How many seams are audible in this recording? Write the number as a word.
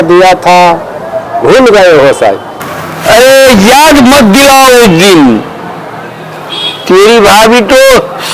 zero